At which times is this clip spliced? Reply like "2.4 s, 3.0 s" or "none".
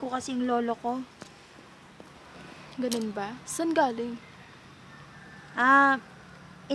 none